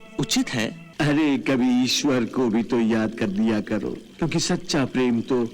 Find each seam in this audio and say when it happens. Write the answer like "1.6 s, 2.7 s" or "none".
0.8 s, 4.0 s